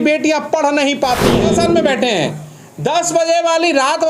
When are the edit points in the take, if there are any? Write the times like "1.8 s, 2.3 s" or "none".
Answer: 1.4 s